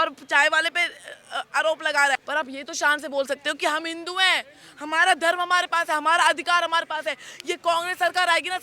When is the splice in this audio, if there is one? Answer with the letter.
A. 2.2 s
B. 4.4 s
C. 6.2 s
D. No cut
A